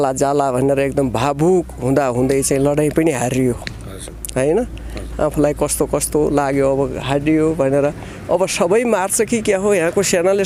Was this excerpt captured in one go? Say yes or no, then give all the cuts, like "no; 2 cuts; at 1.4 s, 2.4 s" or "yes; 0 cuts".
yes; 0 cuts